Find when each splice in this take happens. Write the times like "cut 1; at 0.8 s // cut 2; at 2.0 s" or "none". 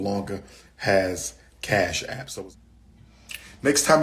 cut 1; at 2.2 s

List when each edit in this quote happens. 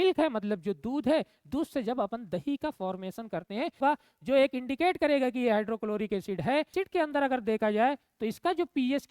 cut 1; at 3.8 s // cut 2; at 6.7 s

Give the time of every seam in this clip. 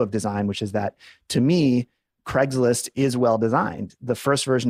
none

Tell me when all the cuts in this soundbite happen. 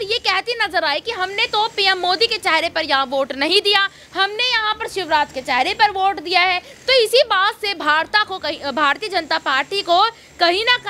none

